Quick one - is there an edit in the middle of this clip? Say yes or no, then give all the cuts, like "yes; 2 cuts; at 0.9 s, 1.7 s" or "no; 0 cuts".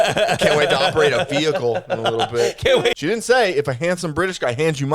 yes; 1 cut; at 3.0 s